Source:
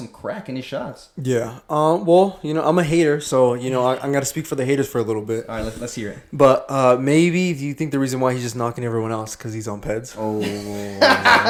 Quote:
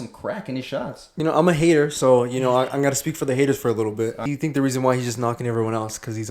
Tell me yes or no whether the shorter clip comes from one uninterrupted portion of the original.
no